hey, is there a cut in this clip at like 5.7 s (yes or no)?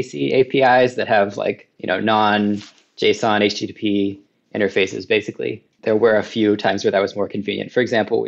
yes